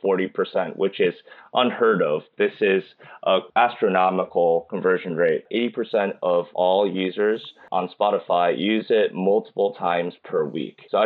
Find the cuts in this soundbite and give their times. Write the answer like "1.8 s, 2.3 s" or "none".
5.5 s, 7.6 s